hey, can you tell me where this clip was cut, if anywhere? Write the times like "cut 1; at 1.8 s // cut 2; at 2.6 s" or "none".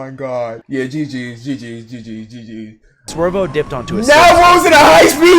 cut 1; at 3.0 s